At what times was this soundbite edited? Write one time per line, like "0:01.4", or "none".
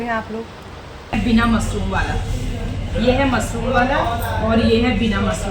0:01.2